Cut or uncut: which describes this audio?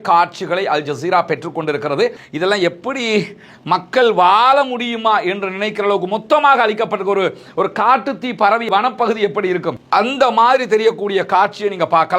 cut